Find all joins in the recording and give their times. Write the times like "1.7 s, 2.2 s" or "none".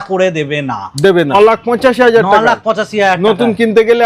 1.3 s